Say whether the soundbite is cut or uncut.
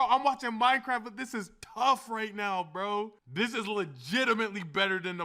cut